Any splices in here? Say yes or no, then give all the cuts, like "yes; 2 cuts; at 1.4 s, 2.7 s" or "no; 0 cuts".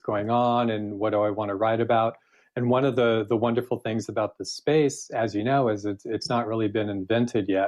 no; 0 cuts